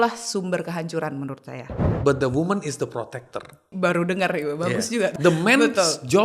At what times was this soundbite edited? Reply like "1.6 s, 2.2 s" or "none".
1.8 s, 3.6 s, 5.2 s